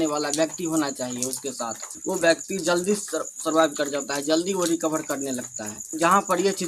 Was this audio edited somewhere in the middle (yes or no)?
yes